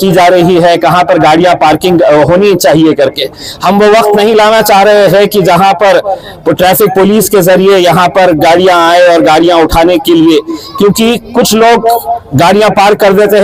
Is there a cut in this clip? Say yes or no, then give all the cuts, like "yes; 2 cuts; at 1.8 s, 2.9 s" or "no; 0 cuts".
no; 0 cuts